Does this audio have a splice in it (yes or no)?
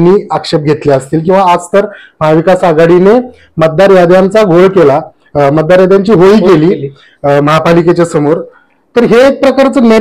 no